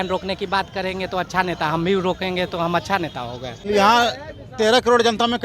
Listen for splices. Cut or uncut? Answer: cut